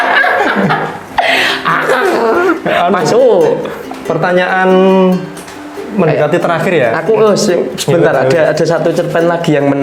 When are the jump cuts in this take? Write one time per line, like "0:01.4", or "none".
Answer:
none